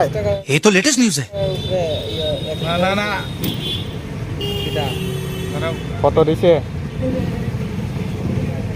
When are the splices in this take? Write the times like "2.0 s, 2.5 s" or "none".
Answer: none